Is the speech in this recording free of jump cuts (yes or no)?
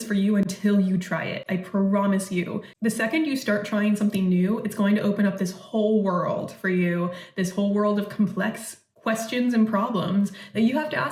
yes